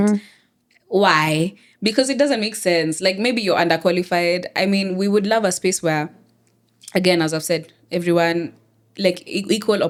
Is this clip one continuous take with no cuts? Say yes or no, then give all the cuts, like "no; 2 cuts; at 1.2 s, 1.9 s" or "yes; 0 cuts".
yes; 0 cuts